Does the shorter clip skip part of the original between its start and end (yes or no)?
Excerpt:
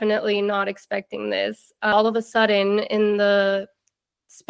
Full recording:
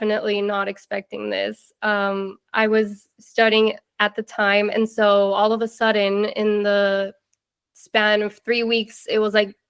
yes